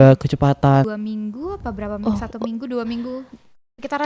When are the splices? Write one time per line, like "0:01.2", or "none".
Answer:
0:01.0